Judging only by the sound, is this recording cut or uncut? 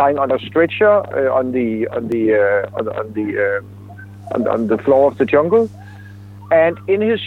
uncut